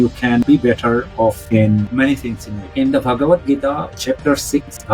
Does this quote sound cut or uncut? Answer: cut